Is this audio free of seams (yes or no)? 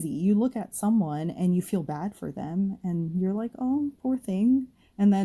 yes